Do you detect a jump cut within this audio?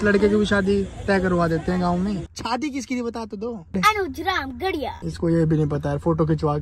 yes; 3 cuts; at 2.3 s, 3.7 s, 5.0 s

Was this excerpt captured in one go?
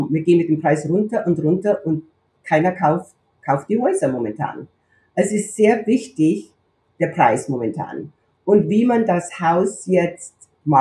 yes; 0 cuts

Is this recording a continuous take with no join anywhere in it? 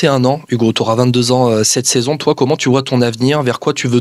yes; 0 cuts

